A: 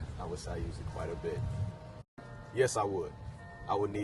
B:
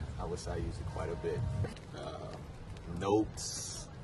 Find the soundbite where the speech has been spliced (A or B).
B